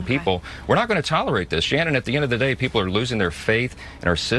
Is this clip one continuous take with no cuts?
yes; 0 cuts

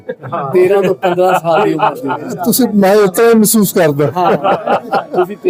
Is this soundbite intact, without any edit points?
yes; 0 cuts

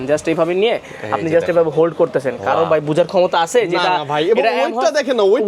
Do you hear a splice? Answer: no; 0 cuts

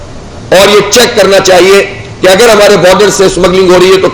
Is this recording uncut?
yes; 0 cuts

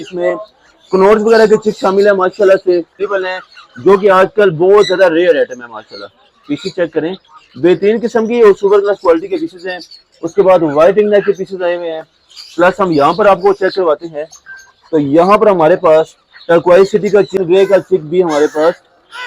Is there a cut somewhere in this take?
yes; 2 cuts; at 3.0 s, 17.4 s

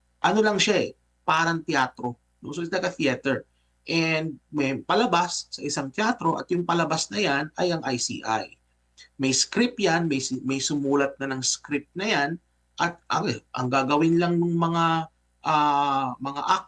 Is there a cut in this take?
no; 0 cuts

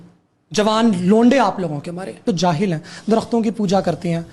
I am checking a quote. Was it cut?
yes; 1 cut; at 2.2 s

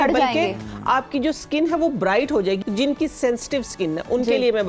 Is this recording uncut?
no; 1 cut; at 2.6 s

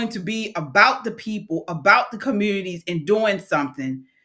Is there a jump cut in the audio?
no; 0 cuts

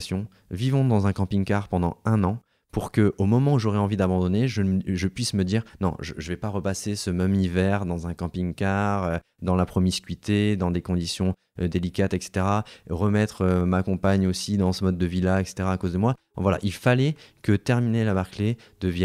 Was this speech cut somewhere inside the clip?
no; 0 cuts

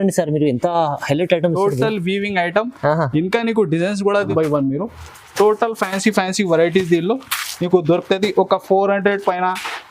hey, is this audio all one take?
no; 1 cut; at 4.3 s

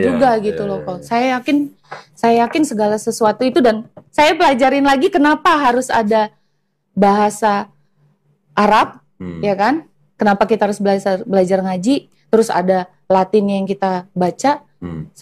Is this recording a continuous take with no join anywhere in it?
yes; 0 cuts

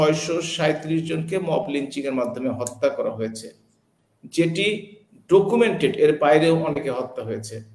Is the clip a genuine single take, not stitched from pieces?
yes; 0 cuts

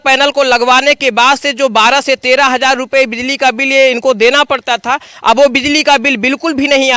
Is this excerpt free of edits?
yes; 0 cuts

